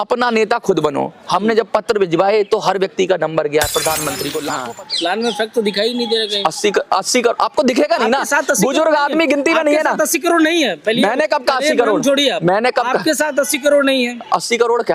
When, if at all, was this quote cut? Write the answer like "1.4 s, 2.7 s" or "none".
4.5 s